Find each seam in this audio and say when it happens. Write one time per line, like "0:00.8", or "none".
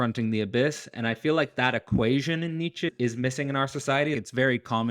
0:02.9
0:04.2